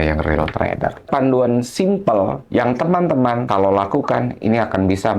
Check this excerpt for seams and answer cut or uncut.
cut